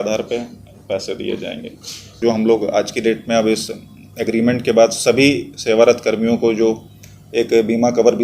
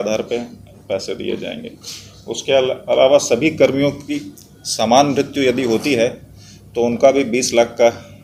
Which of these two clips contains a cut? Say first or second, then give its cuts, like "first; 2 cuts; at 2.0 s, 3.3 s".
first; 1 cut; at 2.2 s